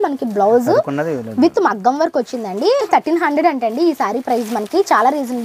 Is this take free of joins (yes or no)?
no